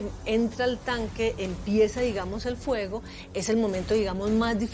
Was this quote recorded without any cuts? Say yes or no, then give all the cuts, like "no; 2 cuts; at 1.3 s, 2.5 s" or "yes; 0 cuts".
yes; 0 cuts